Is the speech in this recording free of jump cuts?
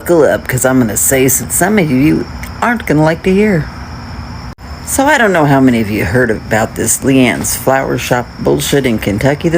no; 1 cut; at 1.4 s

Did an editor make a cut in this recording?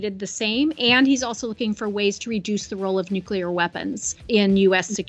yes; 1 cut; at 4.1 s

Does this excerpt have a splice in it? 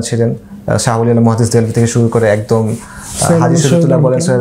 no; 0 cuts

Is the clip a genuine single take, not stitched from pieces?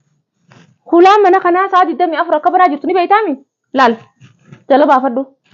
yes; 0 cuts

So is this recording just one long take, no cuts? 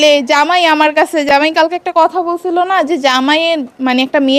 yes; 0 cuts

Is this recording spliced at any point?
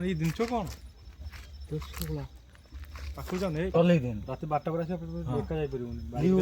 yes; 1 cut; at 3.7 s

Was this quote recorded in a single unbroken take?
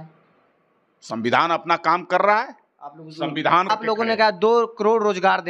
no; 1 cut; at 3.7 s

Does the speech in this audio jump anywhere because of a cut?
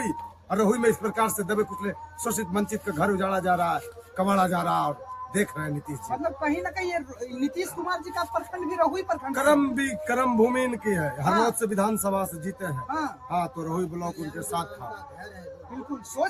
no; 0 cuts

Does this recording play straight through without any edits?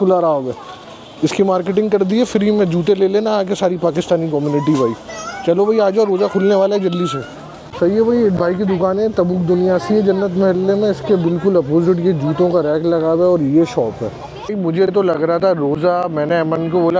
yes; 0 cuts

